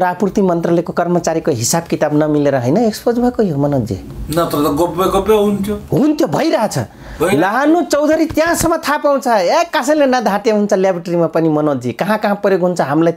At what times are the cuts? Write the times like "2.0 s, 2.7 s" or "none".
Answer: none